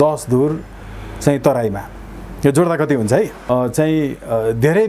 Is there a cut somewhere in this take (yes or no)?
yes